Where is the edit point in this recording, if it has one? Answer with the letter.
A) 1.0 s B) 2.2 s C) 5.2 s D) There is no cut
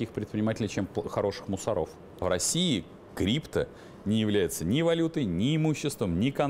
B